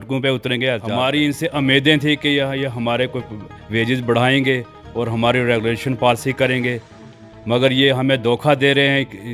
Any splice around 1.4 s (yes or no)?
yes